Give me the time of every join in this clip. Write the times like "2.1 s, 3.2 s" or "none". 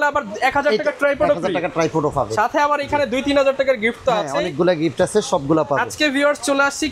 none